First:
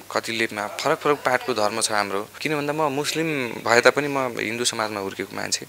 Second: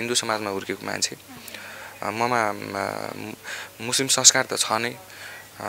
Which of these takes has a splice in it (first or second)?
first